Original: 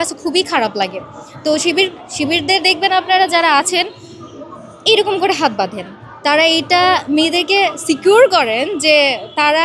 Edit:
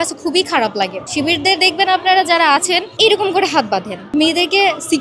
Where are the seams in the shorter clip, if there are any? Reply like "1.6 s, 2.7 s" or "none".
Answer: 1.0 s, 2.9 s, 4.1 s